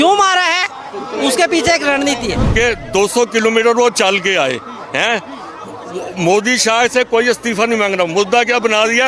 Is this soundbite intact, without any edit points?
no; 1 cut; at 2.4 s

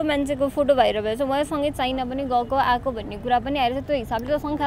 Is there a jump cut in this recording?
no; 0 cuts

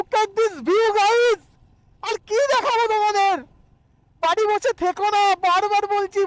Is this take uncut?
yes; 0 cuts

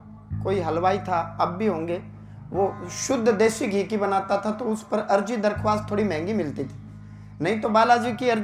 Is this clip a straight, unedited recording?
yes; 0 cuts

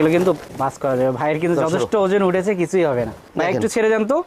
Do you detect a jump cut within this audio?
yes; 1 cut; at 3.3 s

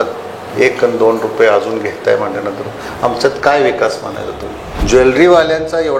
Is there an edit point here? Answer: yes; 1 cut; at 4.7 s

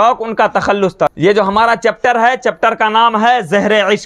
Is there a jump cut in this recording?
yes; 1 cut; at 1.1 s

